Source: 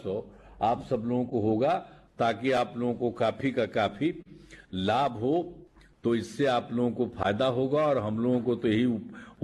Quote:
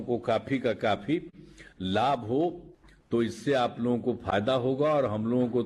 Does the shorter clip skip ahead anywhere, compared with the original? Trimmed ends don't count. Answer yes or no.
no